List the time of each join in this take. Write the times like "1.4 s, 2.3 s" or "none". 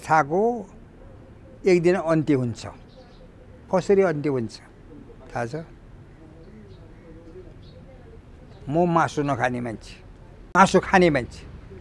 none